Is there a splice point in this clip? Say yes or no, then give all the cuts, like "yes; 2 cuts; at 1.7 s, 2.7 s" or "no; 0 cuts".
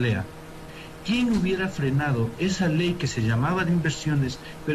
no; 0 cuts